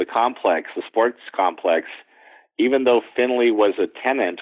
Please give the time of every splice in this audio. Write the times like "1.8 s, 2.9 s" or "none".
none